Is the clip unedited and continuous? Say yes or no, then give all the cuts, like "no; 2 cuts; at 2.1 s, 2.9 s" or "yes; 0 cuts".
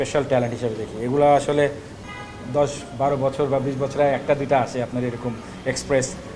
yes; 0 cuts